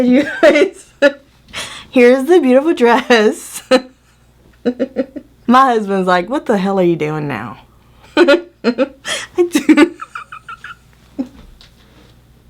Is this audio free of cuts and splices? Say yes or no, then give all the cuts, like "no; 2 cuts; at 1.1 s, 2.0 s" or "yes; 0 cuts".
yes; 0 cuts